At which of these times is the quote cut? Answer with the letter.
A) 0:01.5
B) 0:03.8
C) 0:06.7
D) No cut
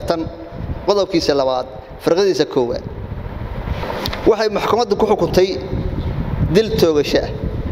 B